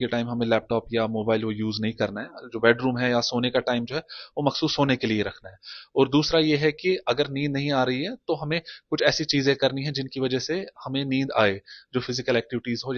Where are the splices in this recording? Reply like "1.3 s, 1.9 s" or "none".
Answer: none